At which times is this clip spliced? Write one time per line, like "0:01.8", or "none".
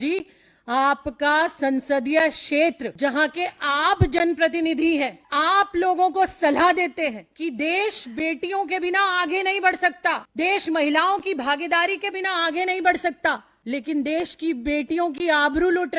0:02.9
0:05.2
0:07.3
0:10.3
0:13.5